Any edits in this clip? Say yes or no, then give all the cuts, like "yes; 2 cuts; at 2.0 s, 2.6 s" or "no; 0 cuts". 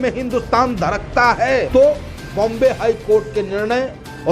yes; 1 cut; at 1.7 s